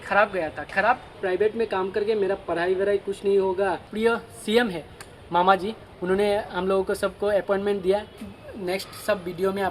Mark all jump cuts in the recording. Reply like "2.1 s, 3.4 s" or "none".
1.2 s, 3.9 s, 8.2 s